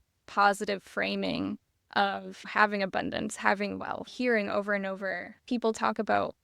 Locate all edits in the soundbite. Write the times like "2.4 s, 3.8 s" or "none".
2.4 s, 4.1 s, 5.3 s